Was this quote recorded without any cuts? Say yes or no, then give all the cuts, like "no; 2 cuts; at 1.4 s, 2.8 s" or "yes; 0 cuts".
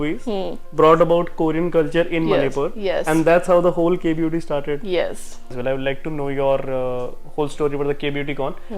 no; 1 cut; at 5.6 s